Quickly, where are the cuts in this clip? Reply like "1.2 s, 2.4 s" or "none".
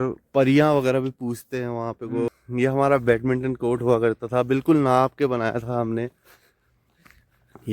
2.3 s